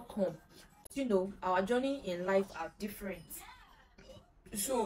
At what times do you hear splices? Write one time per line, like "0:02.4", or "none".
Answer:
0:00.9